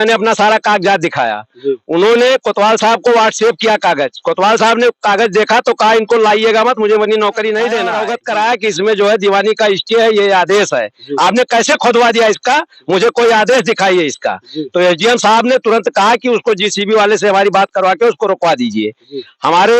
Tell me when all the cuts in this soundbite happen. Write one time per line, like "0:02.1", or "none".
0:08.1